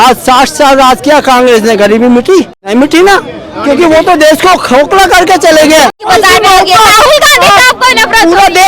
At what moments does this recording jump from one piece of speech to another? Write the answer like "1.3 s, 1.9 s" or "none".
2.6 s, 6.1 s